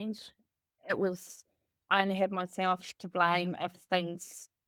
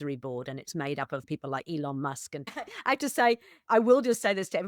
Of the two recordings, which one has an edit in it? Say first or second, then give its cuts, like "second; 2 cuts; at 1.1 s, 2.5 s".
second; 2 cuts; at 1.3 s, 2.5 s